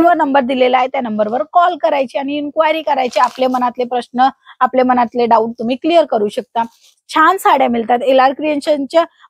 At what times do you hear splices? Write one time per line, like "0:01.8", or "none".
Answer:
none